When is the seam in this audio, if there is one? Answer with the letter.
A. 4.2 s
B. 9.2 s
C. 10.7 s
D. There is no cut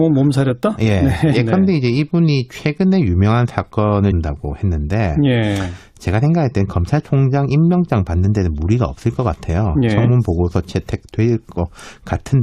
D